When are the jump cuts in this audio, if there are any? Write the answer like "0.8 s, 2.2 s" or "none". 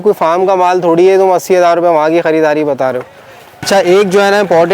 3.6 s